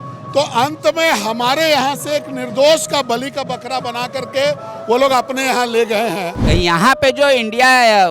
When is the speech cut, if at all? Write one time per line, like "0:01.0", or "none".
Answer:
0:06.4